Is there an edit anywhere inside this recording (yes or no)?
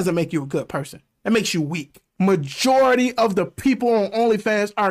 yes